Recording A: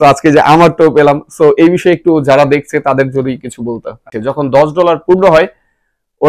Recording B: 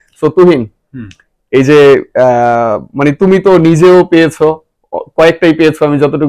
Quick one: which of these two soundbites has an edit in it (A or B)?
A